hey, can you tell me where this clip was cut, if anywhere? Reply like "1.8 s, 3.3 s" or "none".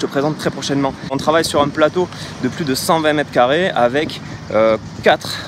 1.2 s